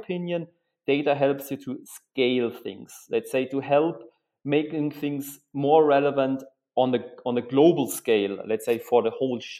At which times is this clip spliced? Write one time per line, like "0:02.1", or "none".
none